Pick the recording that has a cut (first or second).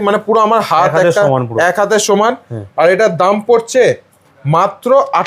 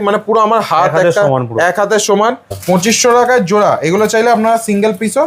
second